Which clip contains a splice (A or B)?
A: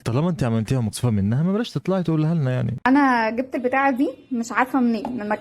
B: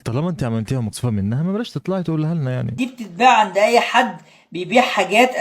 B